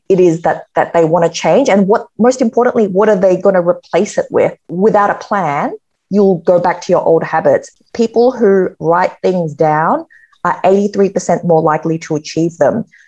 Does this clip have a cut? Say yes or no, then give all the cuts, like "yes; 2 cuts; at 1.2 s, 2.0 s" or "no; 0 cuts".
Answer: yes; 2 cuts; at 4.7 s, 7.7 s